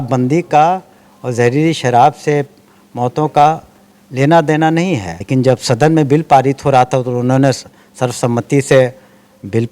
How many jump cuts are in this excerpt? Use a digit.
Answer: 1